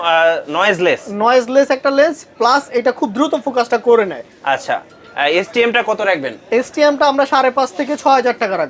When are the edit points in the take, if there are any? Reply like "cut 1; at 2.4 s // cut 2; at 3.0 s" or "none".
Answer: none